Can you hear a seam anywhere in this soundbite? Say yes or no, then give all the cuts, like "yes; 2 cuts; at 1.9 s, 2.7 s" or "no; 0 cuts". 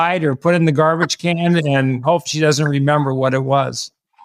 no; 0 cuts